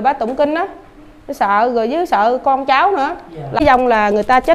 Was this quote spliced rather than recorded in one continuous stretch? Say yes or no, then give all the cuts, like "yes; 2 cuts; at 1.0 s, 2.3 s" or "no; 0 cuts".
yes; 1 cut; at 3.6 s